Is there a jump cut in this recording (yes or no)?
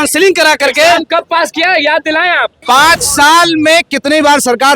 yes